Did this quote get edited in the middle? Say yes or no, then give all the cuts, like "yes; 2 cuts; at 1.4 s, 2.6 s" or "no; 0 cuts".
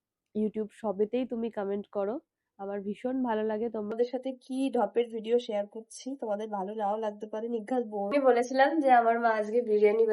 yes; 2 cuts; at 3.9 s, 8.1 s